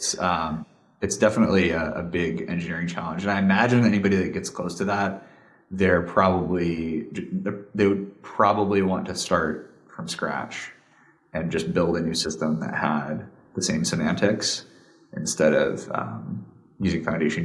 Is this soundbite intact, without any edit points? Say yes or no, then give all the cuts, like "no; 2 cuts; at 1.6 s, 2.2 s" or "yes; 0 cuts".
yes; 0 cuts